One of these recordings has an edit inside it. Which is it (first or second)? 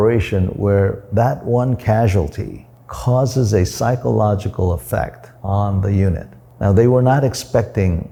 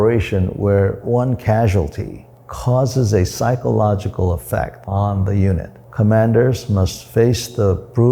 second